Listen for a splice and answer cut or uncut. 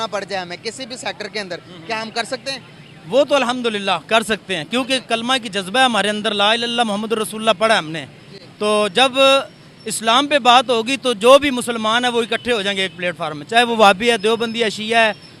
uncut